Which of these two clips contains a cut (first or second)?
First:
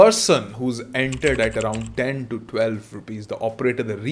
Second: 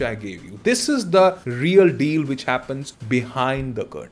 second